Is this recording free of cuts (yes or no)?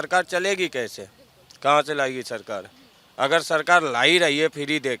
yes